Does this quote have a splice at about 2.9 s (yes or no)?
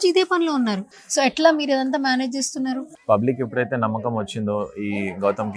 yes